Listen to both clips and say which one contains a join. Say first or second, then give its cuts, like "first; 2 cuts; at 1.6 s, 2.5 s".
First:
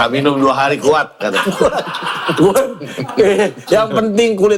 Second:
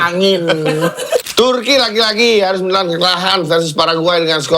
second; 1 cut; at 1.3 s